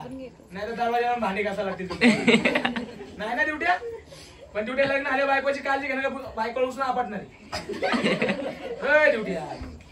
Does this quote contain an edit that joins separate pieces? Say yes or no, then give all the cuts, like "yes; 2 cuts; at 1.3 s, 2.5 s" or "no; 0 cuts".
no; 0 cuts